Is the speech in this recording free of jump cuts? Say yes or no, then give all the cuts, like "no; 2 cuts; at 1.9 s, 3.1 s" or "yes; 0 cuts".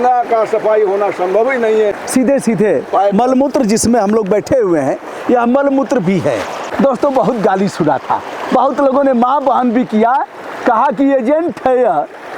no; 2 cuts; at 2.0 s, 6.6 s